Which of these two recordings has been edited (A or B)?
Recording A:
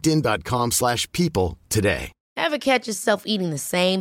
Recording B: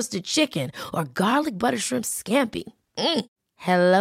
A